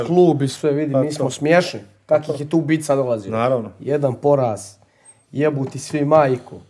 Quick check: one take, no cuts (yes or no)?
yes